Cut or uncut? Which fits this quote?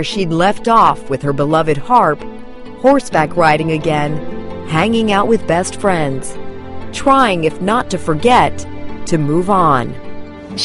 cut